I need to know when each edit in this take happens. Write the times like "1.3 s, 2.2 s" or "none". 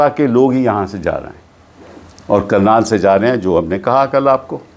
none